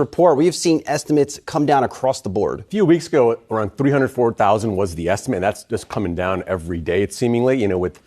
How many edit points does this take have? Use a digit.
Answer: 0